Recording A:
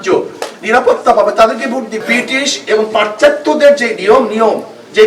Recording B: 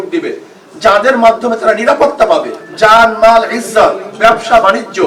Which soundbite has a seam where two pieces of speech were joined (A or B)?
A